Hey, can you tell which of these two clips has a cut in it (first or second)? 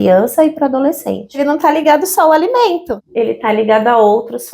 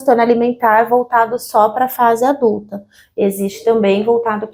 first